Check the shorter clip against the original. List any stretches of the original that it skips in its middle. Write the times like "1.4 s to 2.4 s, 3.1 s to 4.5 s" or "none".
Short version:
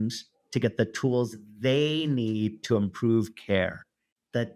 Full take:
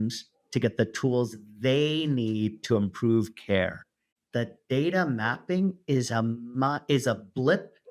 none